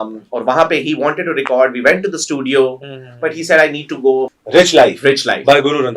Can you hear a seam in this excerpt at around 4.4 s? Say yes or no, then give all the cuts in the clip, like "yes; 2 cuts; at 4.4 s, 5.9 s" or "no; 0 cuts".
yes; 1 cut; at 4.4 s